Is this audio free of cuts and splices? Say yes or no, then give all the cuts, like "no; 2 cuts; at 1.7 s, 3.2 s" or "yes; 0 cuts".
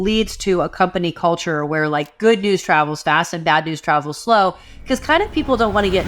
yes; 0 cuts